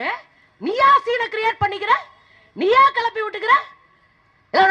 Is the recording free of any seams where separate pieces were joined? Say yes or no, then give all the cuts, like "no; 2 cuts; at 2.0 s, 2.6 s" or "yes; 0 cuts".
yes; 0 cuts